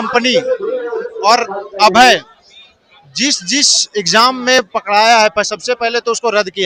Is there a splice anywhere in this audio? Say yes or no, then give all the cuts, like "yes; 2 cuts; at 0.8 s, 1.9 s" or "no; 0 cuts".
no; 0 cuts